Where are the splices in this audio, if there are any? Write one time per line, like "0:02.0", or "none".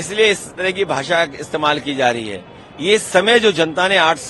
none